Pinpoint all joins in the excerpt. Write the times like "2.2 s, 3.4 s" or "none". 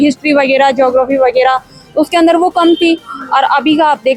none